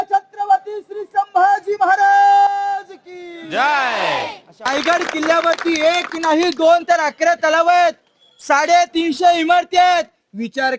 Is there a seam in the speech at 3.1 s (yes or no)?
no